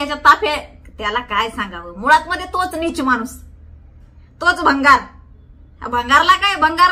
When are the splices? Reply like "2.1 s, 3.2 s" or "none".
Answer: none